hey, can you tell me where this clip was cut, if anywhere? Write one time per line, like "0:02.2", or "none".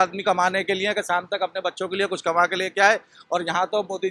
none